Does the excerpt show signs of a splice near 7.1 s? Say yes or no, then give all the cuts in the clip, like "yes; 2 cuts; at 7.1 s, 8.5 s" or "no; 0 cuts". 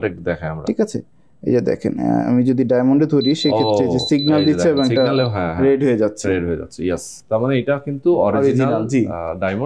no; 0 cuts